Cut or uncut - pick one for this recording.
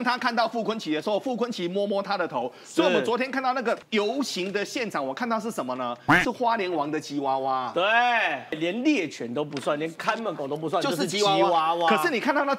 cut